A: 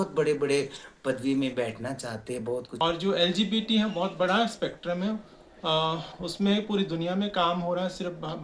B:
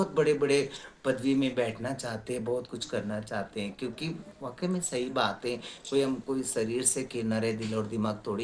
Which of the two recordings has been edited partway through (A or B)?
A